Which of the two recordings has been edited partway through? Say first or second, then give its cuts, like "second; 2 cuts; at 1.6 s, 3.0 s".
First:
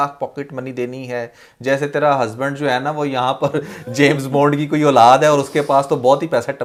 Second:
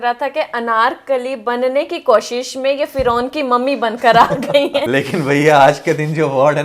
second; 1 cut; at 4.9 s